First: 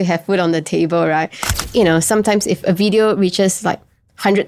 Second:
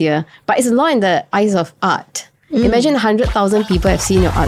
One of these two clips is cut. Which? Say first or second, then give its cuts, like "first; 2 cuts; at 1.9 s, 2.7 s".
first; 1 cut; at 1.6 s